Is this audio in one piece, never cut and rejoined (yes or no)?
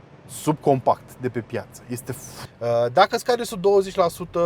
no